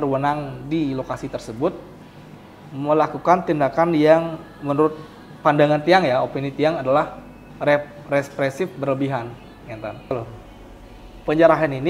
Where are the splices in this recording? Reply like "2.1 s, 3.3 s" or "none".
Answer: 10.1 s

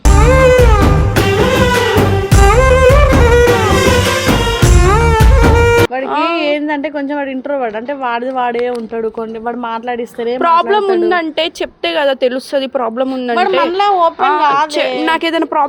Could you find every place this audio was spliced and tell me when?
5.9 s

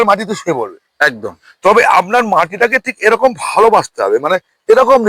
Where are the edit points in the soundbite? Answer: none

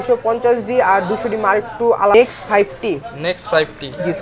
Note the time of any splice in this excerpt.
2.1 s

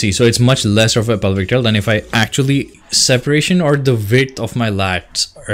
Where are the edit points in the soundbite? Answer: 2.8 s

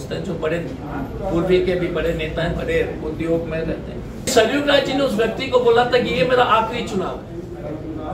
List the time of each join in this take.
4.3 s

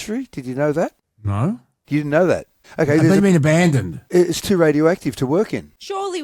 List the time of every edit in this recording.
none

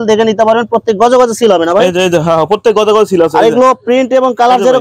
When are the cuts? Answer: none

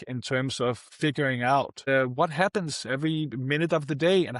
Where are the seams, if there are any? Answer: 1.8 s

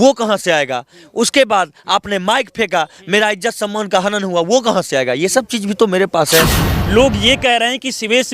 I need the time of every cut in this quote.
6.7 s

